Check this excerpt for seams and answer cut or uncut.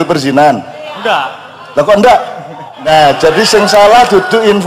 cut